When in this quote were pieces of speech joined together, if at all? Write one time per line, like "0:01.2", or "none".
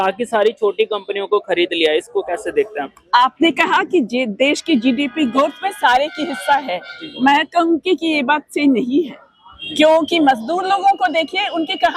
none